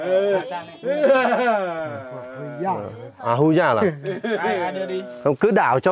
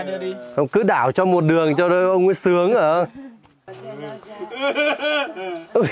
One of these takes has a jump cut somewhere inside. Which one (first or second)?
second